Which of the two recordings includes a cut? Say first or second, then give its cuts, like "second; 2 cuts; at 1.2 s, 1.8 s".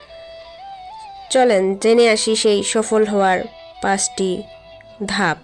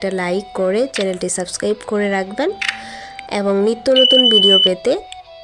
second; 1 cut; at 3.5 s